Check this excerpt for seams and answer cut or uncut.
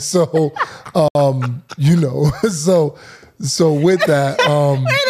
uncut